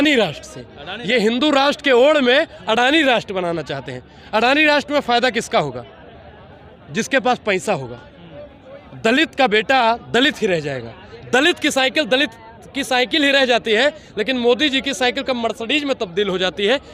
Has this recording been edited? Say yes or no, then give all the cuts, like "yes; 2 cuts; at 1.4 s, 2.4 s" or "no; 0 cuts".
no; 0 cuts